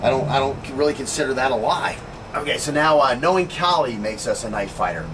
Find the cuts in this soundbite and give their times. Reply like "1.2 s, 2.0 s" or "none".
2.8 s

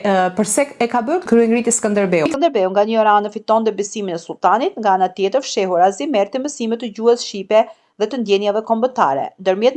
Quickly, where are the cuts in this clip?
2.3 s

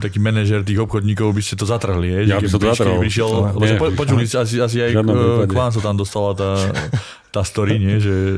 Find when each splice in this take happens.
none

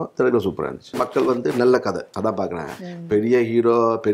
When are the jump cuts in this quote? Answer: 1.0 s, 2.1 s

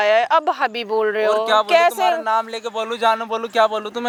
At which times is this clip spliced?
none

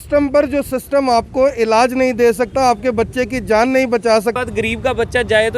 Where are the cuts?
4.4 s

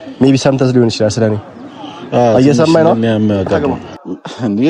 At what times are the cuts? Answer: 3.7 s

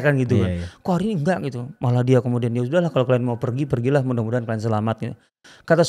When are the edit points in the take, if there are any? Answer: none

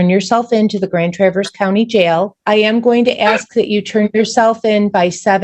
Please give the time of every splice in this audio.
2.4 s

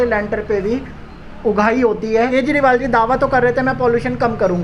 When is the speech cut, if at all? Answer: 2.2 s

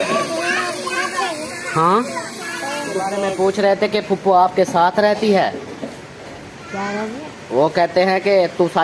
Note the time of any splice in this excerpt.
3.3 s

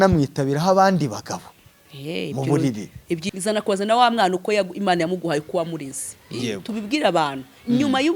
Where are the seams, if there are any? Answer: 3.2 s

